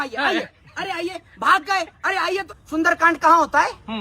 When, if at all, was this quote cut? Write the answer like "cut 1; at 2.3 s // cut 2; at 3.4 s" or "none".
cut 1; at 2.5 s